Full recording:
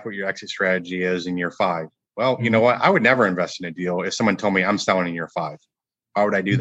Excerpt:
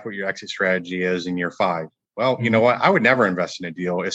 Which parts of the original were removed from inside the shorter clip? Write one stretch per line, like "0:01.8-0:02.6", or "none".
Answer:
none